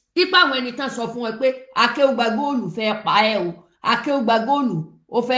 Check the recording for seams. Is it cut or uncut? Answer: uncut